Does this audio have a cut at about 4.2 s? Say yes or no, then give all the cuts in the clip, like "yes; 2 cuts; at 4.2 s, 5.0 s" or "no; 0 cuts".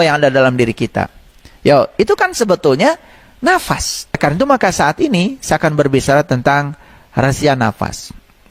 yes; 1 cut; at 4.2 s